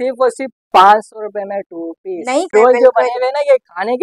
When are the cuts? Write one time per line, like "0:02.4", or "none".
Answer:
0:02.5